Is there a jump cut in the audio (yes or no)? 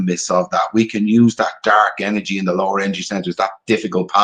no